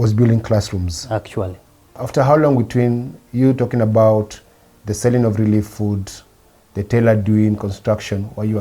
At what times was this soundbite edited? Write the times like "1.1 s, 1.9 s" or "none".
2.0 s